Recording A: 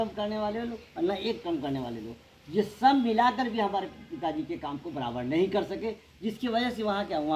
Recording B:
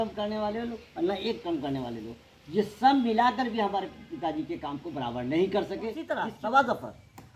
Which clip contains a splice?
B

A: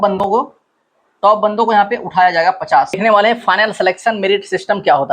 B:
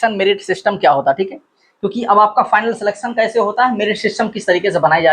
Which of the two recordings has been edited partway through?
A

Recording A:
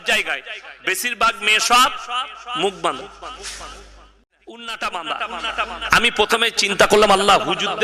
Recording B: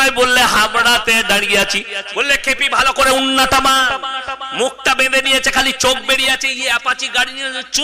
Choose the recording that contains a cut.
A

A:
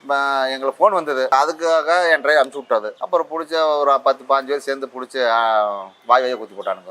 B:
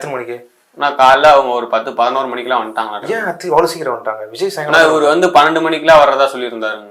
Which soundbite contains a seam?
A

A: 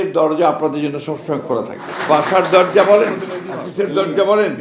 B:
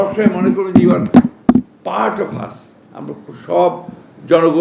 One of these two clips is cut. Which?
A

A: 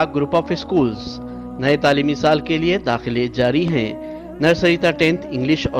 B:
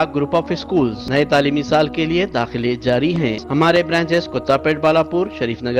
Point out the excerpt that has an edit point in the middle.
B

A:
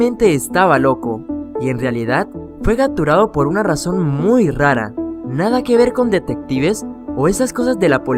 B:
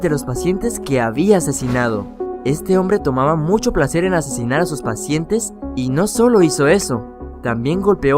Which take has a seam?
B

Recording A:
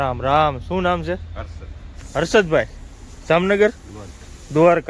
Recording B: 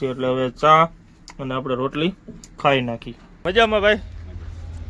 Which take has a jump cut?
B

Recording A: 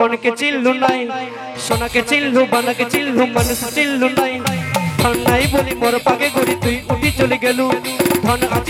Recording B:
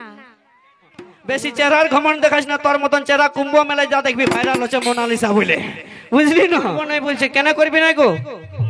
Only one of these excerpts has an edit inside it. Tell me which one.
B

